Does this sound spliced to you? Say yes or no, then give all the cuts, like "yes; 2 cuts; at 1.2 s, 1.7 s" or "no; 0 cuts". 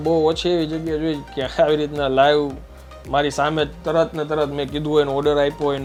no; 0 cuts